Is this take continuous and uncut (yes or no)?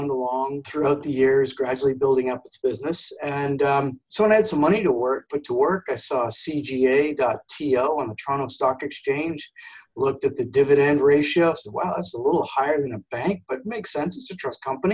yes